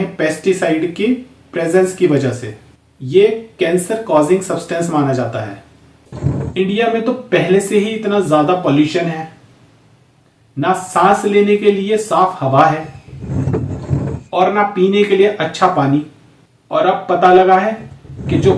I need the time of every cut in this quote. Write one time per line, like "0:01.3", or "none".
0:06.1